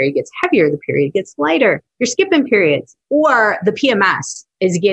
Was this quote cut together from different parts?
yes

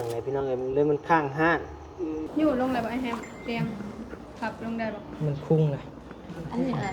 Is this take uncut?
no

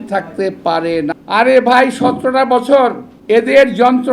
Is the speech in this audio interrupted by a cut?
yes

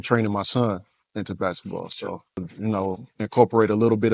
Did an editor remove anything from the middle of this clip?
yes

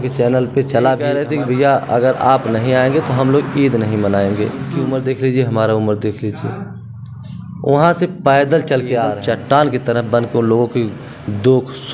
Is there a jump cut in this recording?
yes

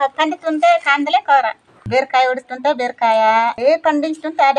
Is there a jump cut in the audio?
yes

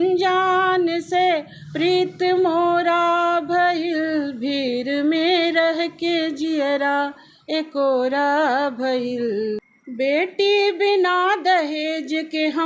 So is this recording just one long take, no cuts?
no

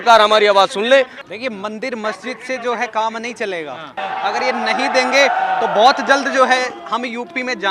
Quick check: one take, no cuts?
no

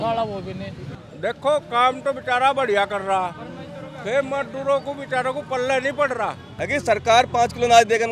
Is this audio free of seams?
no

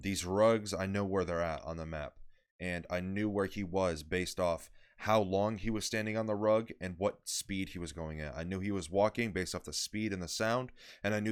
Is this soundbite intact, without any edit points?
yes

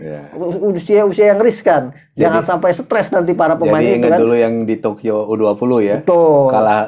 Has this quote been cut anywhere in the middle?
no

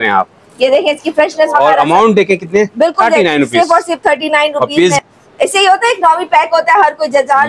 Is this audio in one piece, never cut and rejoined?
no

